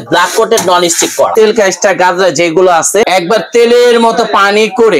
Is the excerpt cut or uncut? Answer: cut